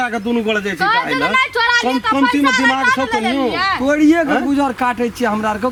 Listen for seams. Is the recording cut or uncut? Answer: uncut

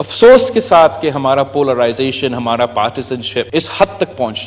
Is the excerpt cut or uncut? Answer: cut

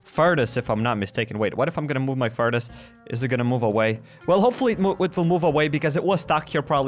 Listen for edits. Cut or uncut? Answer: uncut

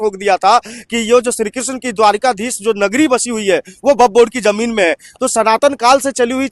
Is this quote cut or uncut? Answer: uncut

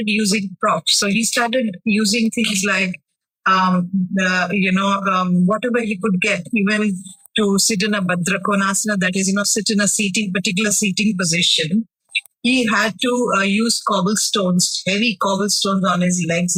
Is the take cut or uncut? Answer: uncut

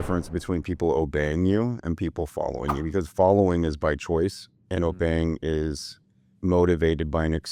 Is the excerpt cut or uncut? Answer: uncut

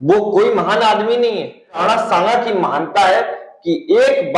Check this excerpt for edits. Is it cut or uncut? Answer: cut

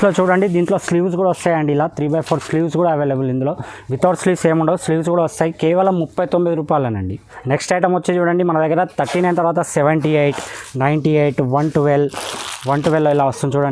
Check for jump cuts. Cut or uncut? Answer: uncut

